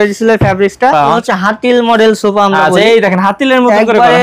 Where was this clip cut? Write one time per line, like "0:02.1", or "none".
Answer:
0:01.2